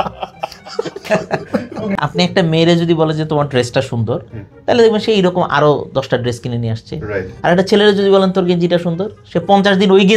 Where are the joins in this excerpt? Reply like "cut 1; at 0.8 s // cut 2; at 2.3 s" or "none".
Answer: cut 1; at 2.0 s